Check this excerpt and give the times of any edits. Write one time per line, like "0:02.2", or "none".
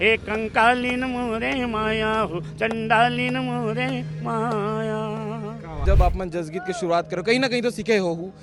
0:05.8